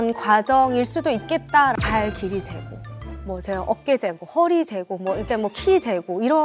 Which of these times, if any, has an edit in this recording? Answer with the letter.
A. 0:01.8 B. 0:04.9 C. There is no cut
A